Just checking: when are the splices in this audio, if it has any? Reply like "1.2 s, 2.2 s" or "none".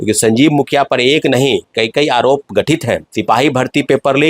3.1 s